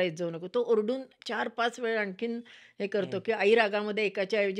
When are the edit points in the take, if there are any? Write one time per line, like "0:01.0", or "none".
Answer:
none